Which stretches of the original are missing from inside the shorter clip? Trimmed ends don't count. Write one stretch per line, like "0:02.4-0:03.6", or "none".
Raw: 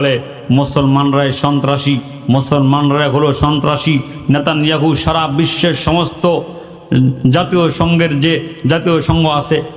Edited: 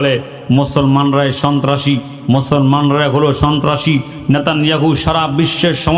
none